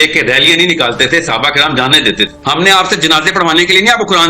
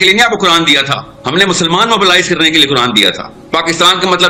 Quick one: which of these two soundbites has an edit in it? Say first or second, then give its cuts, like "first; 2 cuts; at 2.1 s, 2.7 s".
first; 1 cut; at 2.4 s